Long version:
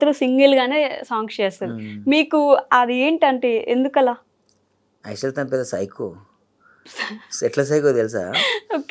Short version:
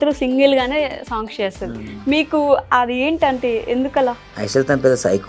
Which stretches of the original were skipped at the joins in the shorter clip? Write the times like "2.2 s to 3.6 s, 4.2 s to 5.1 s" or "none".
4.3 s to 5.0 s